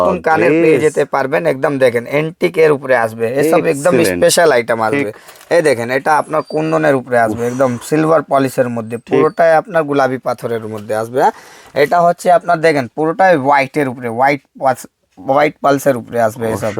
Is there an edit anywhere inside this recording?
no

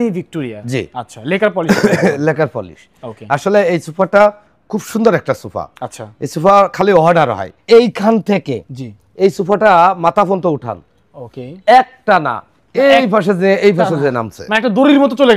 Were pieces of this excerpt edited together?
yes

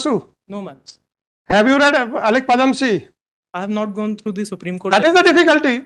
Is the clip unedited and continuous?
yes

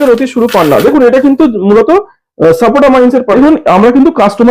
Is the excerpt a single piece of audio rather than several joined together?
no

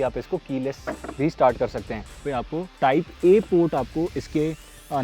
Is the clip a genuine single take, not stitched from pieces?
no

